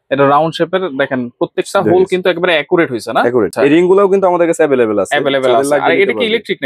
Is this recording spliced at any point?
yes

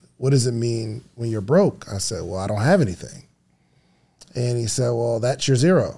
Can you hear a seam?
no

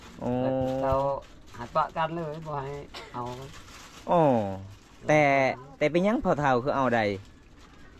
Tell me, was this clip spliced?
no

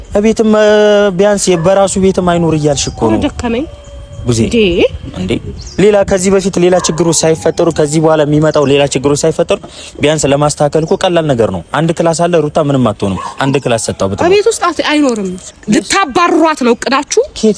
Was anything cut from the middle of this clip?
yes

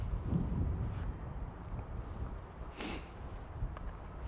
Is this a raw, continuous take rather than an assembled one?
yes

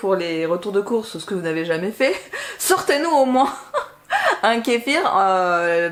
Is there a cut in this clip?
no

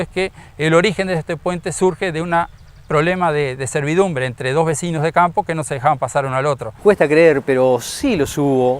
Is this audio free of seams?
no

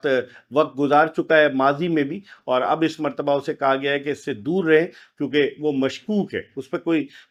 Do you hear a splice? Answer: no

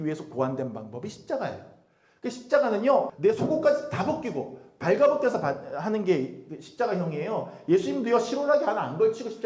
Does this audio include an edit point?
yes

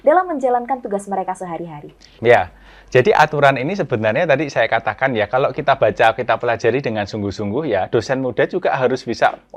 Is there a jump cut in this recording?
no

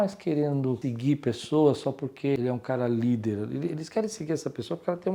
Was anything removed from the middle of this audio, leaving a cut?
yes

